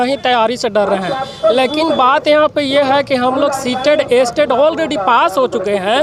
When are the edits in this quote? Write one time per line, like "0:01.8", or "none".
none